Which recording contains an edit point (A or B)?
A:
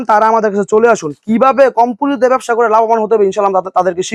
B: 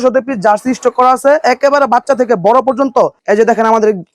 B